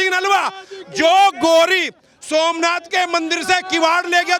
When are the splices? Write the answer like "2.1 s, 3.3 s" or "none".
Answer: none